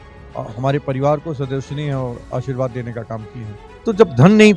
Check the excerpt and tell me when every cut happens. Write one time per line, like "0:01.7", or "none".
0:03.6